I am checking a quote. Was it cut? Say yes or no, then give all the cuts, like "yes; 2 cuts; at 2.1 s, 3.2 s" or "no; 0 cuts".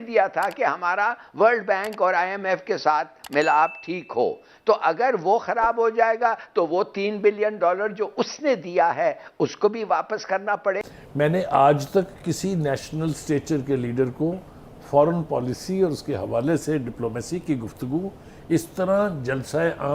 yes; 1 cut; at 10.8 s